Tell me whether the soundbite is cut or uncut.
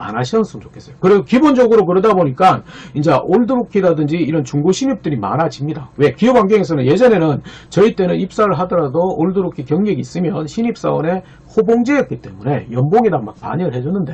uncut